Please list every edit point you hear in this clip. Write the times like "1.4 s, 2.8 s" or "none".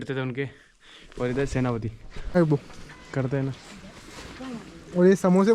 2.4 s